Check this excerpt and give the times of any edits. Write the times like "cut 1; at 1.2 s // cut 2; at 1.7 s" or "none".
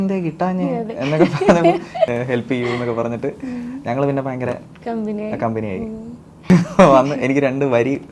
cut 1; at 2.1 s // cut 2; at 6.4 s